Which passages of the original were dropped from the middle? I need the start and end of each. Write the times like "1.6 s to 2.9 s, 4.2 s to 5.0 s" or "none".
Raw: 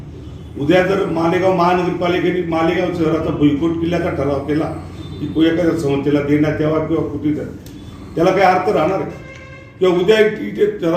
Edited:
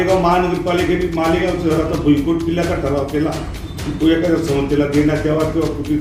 none

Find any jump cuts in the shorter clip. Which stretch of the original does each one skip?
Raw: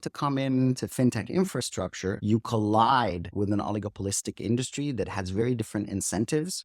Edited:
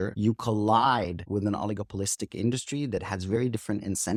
none

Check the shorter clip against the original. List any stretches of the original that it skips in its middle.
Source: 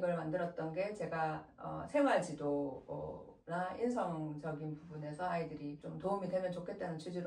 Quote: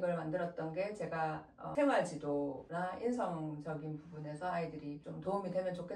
1.6 s to 1.8 s, 2.8 s to 3.4 s

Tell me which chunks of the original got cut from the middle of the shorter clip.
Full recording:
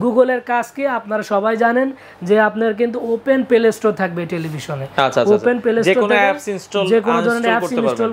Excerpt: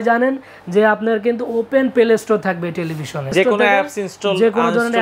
4.9 s to 5.8 s

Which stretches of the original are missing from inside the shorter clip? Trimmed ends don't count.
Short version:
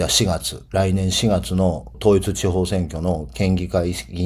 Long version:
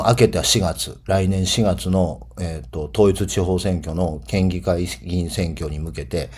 2.2 s to 2.8 s

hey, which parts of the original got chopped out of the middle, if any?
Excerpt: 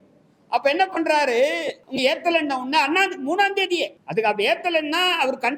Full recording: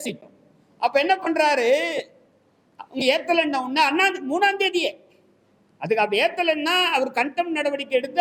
2.1 s to 2.8 s, 5.0 s to 5.7 s

